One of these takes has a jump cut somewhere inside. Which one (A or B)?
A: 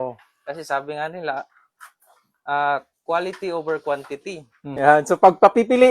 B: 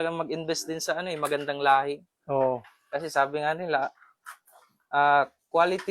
A